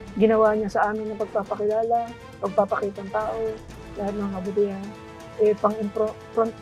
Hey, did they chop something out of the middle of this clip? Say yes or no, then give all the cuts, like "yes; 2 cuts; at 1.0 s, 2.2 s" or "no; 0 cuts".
no; 0 cuts